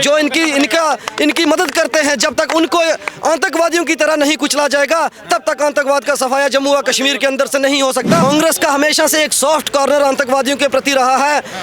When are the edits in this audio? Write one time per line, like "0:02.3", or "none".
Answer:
0:08.2